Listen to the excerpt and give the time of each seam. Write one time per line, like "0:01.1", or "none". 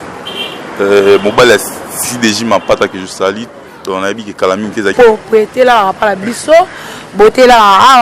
0:04.9